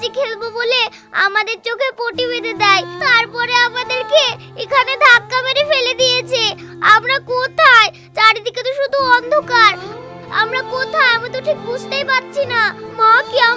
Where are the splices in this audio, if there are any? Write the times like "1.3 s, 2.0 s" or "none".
none